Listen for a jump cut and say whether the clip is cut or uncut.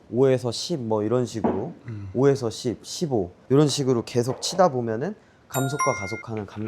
uncut